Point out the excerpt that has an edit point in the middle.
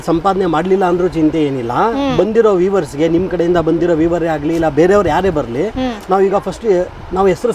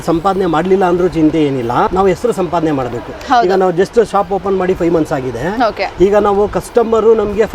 second; 1 cut; at 1.9 s

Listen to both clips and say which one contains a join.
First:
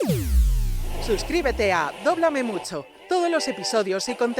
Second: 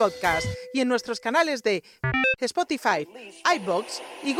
first; 1 cut; at 1.0 s

